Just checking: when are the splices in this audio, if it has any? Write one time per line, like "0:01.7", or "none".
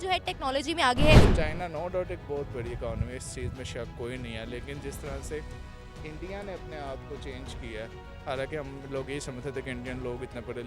0:01.3